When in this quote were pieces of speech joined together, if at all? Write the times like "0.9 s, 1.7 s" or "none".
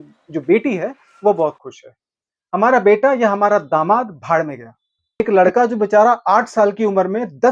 5.2 s